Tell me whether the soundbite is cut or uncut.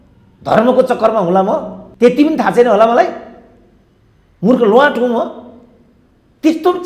cut